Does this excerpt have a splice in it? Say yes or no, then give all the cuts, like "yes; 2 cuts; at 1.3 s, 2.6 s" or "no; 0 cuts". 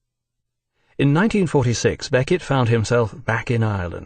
yes; 1 cut; at 2.0 s